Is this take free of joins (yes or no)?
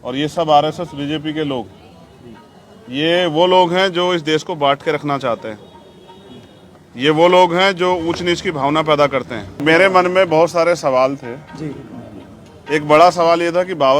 no